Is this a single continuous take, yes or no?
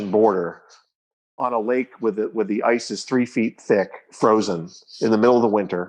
yes